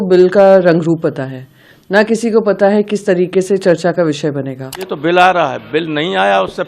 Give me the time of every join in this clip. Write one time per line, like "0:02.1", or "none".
0:04.9